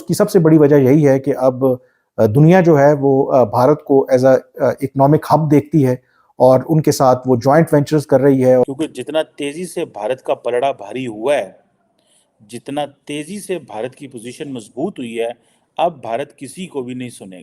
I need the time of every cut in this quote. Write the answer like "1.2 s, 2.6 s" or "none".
8.7 s